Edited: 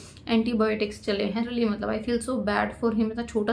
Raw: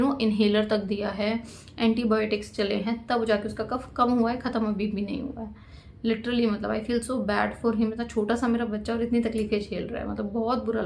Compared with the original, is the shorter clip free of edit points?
no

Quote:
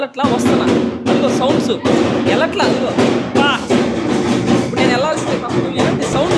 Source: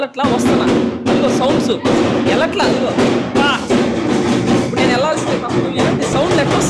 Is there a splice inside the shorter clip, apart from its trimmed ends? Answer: no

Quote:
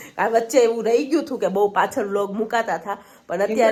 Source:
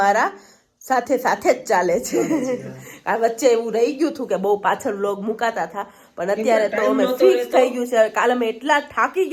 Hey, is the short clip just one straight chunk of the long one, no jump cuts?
yes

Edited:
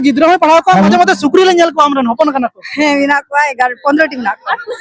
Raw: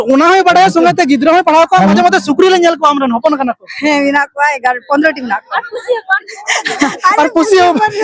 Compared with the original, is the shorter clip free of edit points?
yes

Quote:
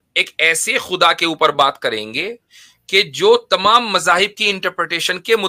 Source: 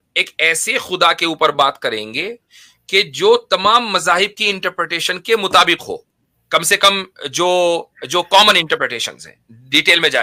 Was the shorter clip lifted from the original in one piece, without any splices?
yes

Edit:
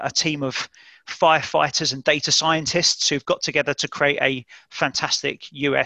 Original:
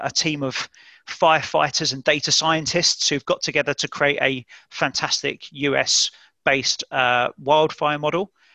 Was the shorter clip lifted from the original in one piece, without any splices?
yes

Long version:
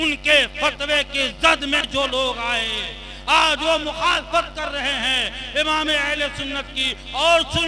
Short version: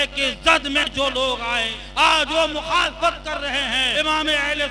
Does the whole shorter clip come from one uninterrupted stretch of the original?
no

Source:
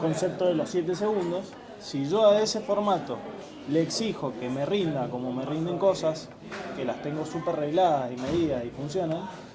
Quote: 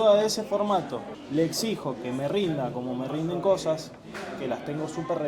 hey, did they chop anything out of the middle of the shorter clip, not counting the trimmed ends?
yes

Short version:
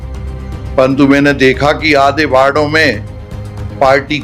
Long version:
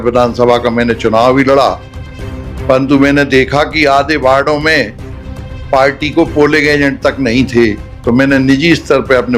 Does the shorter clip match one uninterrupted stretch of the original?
yes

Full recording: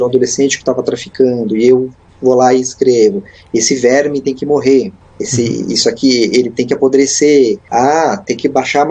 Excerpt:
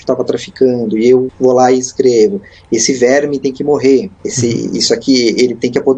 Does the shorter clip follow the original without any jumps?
no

